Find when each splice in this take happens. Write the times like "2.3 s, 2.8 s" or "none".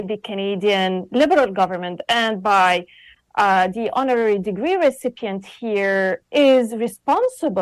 none